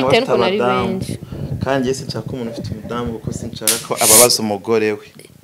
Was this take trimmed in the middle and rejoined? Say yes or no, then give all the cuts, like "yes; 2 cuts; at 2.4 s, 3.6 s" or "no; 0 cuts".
no; 0 cuts